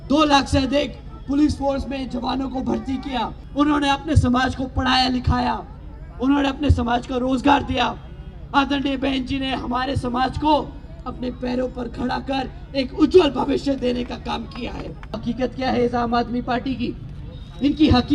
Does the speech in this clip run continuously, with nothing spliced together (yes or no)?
no